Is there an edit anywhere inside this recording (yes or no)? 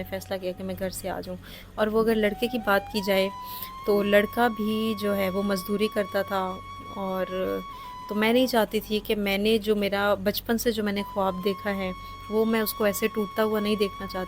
no